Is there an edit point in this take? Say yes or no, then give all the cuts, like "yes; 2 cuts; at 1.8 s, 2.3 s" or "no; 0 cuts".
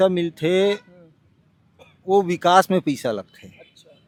no; 0 cuts